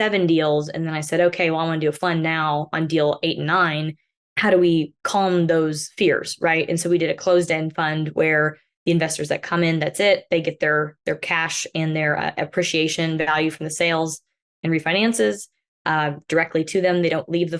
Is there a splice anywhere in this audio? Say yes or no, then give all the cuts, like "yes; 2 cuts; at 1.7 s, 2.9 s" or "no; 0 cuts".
no; 0 cuts